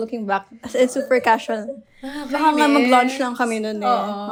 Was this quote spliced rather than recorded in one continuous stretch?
no; 0 cuts

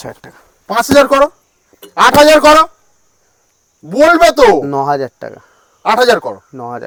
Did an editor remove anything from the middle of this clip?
no; 0 cuts

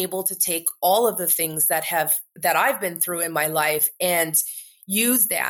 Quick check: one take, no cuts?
yes; 0 cuts

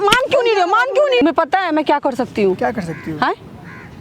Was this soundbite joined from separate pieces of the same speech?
yes; 1 cut; at 1.2 s

